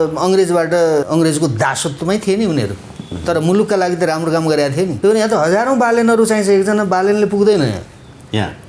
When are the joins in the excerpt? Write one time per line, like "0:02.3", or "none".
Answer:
0:01.0
0:04.9